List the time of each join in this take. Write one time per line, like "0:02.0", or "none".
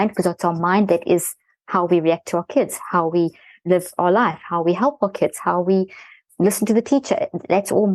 0:03.5